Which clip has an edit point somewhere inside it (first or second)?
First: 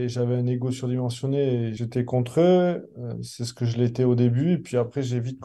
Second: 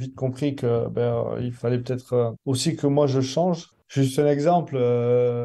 second